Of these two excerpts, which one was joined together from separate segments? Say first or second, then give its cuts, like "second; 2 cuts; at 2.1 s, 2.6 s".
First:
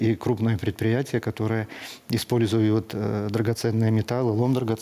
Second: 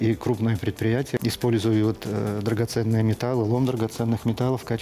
second; 1 cut; at 1.2 s